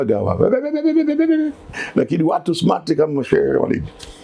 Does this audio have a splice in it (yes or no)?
yes